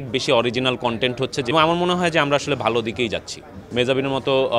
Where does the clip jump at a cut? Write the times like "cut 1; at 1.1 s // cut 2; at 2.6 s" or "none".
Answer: cut 1; at 1.5 s // cut 2; at 3.6 s